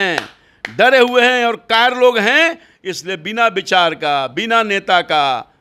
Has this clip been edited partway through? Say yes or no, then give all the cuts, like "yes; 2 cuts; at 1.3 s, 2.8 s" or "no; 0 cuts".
no; 0 cuts